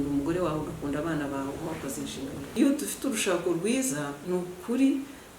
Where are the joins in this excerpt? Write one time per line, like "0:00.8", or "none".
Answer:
0:02.4